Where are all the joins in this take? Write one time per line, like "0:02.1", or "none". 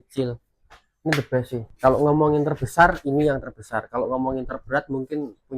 0:01.6